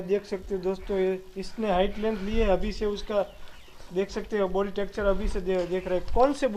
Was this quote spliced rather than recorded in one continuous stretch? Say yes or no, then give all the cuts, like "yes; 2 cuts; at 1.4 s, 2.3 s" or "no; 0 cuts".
no; 0 cuts